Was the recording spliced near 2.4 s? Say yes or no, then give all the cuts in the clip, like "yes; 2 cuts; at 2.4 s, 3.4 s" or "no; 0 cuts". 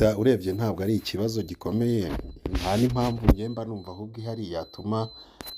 no; 0 cuts